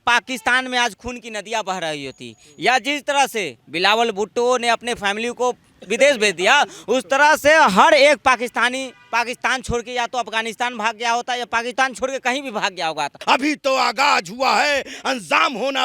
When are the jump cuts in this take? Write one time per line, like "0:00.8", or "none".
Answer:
0:13.2